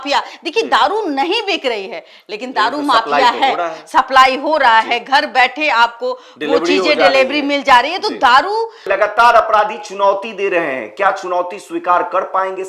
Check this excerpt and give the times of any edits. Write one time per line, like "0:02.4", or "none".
0:08.9